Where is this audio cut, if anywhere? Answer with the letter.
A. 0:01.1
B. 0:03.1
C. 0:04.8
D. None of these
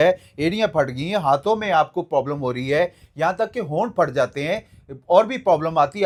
D